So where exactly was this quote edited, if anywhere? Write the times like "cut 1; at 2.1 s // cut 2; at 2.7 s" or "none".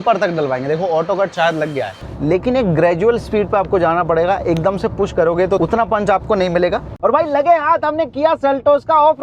cut 1; at 2.0 s // cut 2; at 5.6 s // cut 3; at 6.9 s